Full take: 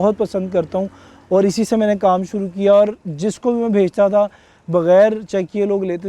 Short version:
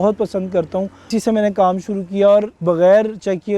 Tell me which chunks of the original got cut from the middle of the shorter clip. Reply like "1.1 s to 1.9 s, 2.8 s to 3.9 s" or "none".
1.1 s to 1.5 s, 3.0 s to 4.6 s